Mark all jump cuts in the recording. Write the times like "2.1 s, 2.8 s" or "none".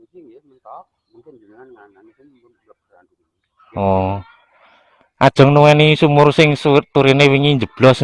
none